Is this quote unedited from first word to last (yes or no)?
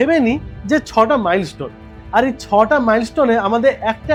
yes